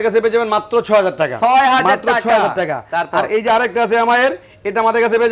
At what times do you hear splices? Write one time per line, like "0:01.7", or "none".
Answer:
none

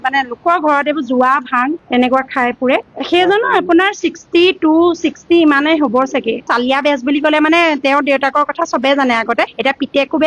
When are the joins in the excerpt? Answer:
none

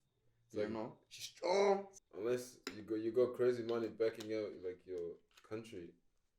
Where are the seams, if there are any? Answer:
0:01.9

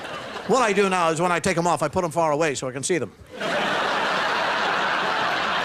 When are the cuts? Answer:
0:03.2

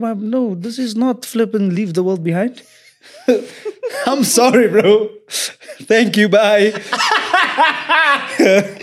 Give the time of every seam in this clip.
none

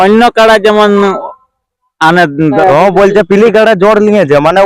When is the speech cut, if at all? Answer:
0:02.6

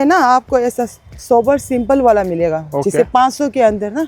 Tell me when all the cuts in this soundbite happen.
none

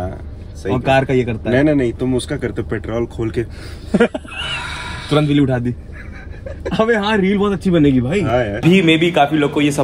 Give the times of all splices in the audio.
0:08.6

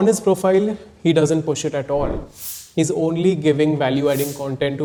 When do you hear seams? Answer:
none

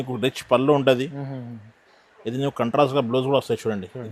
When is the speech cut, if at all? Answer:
none

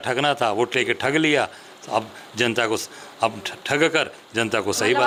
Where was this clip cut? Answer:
none

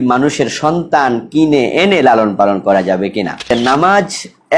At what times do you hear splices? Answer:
0:03.4

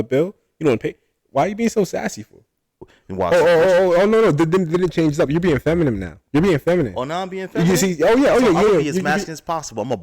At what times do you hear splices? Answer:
0:02.9

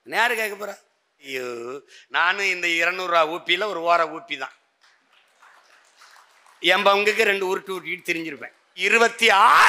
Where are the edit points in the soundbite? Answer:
0:01.3
0:08.7

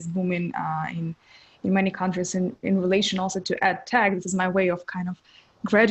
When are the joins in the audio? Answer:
none

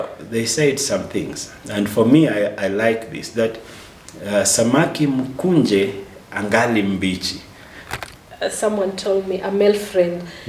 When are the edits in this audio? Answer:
0:07.8

